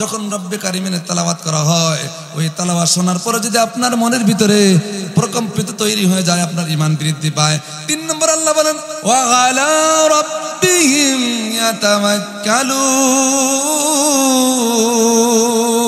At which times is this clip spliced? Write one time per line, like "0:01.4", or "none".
0:08.9